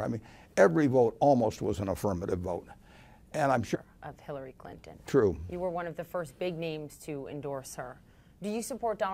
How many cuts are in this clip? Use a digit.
0